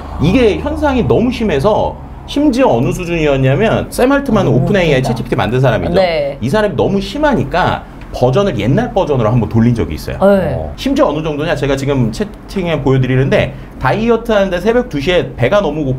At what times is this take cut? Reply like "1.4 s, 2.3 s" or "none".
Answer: 3.9 s, 10.6 s

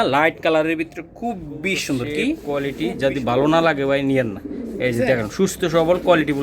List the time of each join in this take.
2.4 s

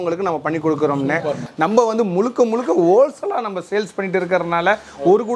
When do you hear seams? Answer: 1.4 s

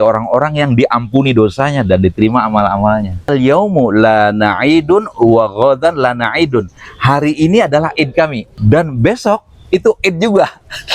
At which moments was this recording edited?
3.2 s, 8.5 s

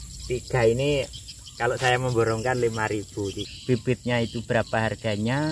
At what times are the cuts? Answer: 3.4 s

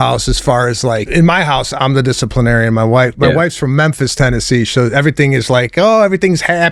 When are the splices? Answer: 1.1 s, 1.7 s

